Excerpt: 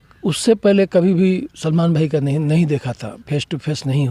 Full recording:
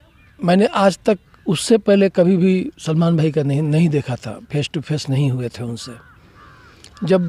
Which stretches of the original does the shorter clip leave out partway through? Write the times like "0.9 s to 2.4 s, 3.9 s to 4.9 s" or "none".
none